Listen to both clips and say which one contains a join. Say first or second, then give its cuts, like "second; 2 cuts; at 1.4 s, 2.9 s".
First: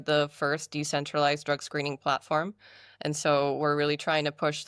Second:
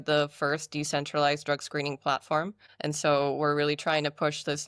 second; 1 cut; at 2.6 s